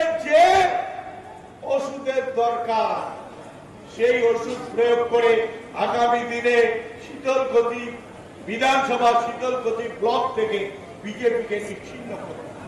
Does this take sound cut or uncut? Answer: uncut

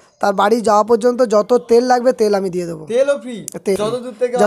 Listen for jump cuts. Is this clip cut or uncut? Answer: uncut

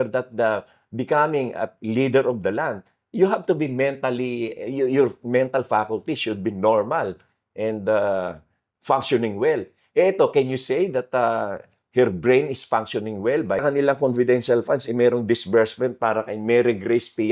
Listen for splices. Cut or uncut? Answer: cut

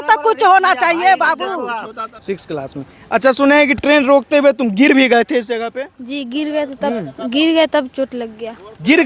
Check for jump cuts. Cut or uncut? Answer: cut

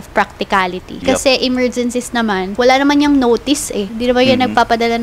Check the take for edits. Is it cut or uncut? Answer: cut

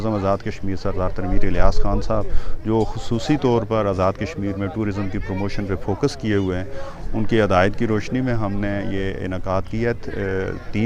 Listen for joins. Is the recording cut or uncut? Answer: uncut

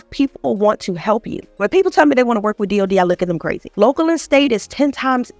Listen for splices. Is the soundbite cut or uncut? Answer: cut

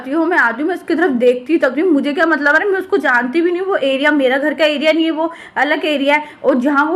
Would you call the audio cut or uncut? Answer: uncut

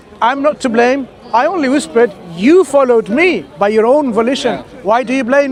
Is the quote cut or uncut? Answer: uncut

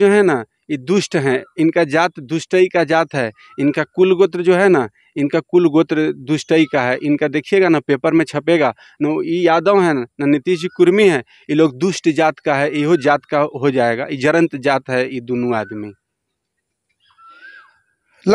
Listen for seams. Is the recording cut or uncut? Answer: uncut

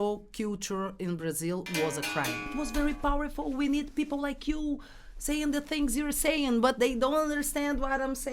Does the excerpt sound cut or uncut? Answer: cut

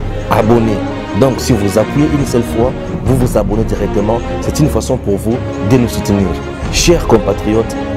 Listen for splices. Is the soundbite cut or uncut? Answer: uncut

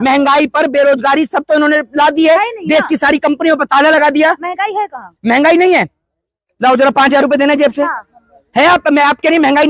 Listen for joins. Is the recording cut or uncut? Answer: uncut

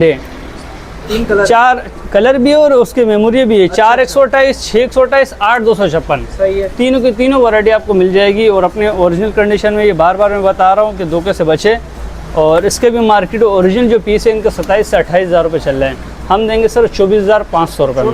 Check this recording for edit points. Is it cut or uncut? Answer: uncut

